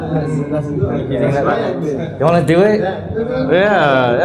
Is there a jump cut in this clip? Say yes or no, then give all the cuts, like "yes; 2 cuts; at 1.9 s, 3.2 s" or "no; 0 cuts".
no; 0 cuts